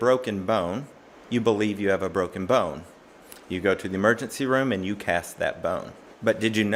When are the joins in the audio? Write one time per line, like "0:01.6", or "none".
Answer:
none